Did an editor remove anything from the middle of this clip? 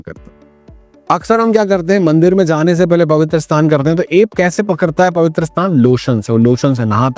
no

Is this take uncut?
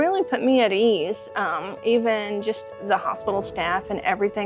yes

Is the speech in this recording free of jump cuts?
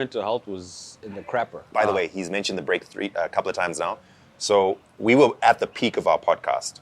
yes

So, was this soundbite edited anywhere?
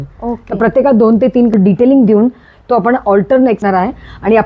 yes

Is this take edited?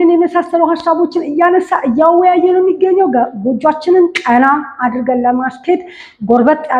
no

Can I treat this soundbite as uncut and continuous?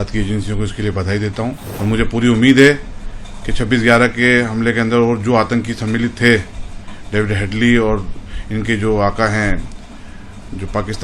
no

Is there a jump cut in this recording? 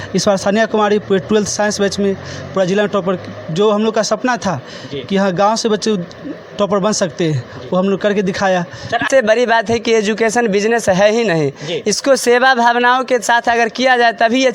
yes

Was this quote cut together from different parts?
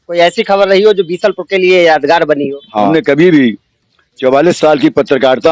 yes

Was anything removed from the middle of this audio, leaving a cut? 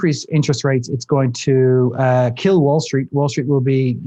no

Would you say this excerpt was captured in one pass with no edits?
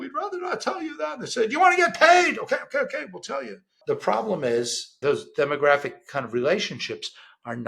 no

